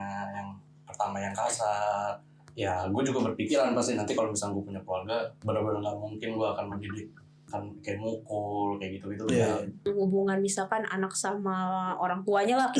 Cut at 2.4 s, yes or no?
yes